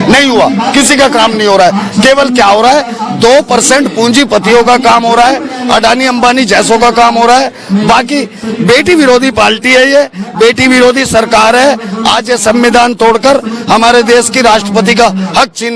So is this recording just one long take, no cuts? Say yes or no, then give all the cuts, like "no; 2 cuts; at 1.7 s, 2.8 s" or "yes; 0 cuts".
yes; 0 cuts